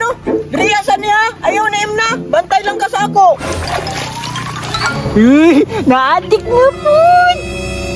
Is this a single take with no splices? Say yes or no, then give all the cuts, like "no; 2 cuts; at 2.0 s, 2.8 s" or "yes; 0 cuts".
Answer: yes; 0 cuts